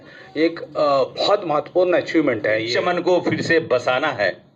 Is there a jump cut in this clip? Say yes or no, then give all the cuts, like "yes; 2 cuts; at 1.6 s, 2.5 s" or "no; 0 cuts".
yes; 1 cut; at 2.7 s